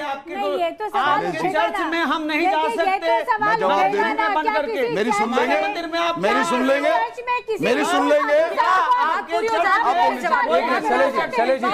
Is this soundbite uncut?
yes; 0 cuts

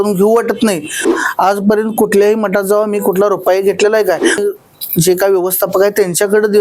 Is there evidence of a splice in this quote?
yes; 2 cuts; at 1.1 s, 4.4 s

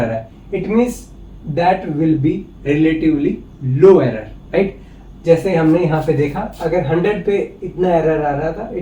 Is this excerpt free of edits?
yes; 0 cuts

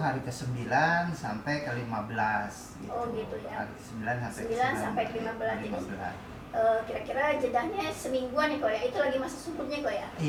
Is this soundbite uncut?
yes; 0 cuts

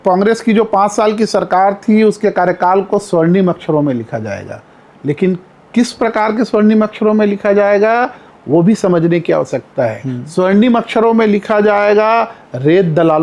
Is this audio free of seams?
yes; 0 cuts

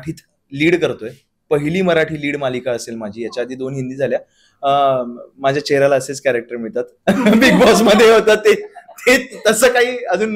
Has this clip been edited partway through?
no; 0 cuts

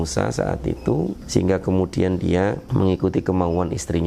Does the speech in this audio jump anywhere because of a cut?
yes; 2 cuts; at 1.2 s, 2.6 s

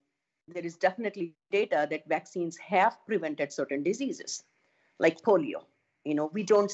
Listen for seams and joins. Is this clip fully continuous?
yes; 0 cuts

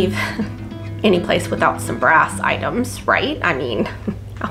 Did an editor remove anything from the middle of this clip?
no; 0 cuts

